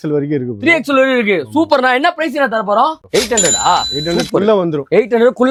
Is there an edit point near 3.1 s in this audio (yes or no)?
no